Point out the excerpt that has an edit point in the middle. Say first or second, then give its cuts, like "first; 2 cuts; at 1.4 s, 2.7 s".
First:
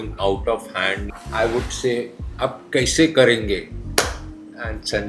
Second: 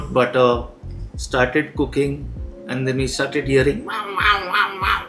first; 1 cut; at 1.0 s